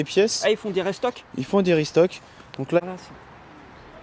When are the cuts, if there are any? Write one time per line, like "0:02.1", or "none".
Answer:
0:02.8